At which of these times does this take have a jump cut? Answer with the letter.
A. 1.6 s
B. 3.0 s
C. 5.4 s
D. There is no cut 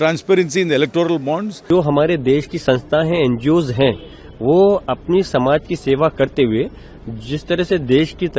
A